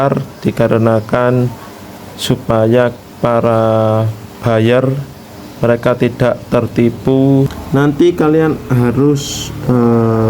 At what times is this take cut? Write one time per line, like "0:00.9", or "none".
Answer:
0:07.6